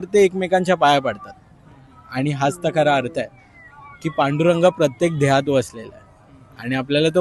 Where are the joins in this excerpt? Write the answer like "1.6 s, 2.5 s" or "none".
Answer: none